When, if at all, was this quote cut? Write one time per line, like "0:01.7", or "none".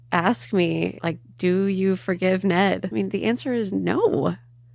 0:01.0
0:02.9